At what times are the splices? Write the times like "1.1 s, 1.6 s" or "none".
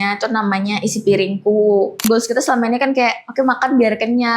2.0 s